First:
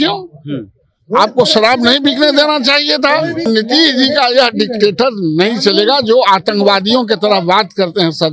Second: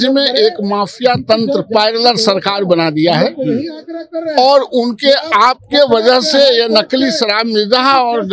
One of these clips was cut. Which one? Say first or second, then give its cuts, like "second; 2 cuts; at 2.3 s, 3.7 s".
first; 1 cut; at 3.4 s